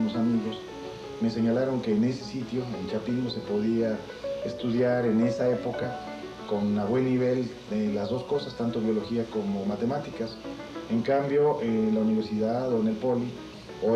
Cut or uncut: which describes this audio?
cut